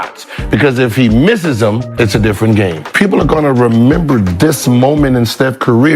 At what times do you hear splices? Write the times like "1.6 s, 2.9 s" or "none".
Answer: 1.9 s, 2.8 s